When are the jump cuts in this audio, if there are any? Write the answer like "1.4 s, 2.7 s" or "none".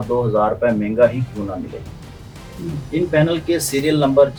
none

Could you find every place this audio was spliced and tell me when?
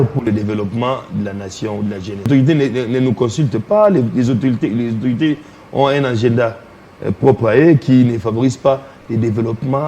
2.3 s

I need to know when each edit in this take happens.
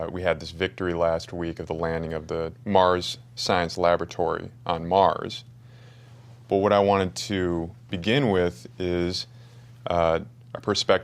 5.4 s

